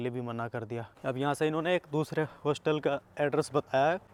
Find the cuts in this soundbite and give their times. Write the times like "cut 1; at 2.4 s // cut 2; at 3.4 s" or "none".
none